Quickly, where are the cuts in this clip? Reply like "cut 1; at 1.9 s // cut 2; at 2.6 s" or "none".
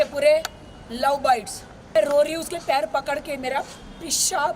cut 1; at 1.9 s